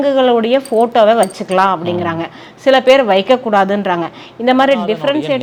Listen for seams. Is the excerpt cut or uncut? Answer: uncut